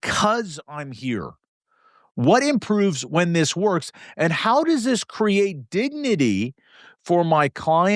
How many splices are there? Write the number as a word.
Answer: zero